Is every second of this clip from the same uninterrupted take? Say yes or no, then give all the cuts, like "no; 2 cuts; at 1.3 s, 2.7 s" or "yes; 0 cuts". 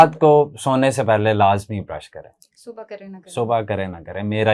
yes; 0 cuts